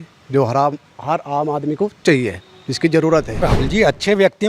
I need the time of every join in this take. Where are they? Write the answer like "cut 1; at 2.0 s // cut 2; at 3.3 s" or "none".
cut 1; at 3.3 s

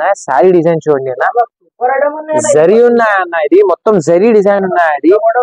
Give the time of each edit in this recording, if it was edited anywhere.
none

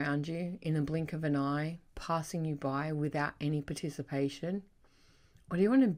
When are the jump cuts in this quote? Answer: none

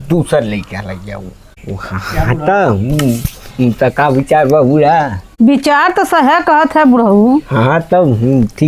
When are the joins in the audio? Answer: cut 1; at 1.4 s // cut 2; at 5.2 s

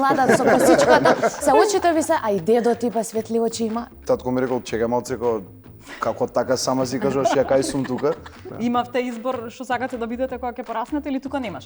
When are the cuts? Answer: cut 1; at 3.9 s // cut 2; at 8.5 s

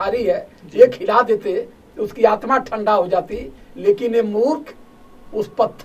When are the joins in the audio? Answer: none

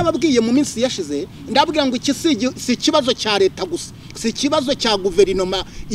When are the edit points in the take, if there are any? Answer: none

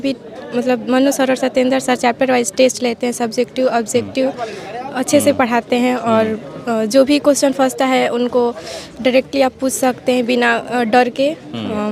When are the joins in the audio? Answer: none

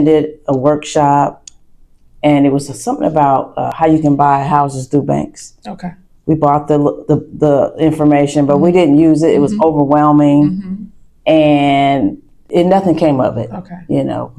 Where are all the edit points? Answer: none

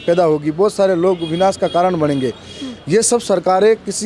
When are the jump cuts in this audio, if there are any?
none

